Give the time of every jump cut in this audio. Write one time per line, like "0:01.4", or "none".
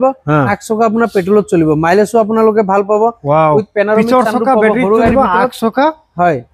none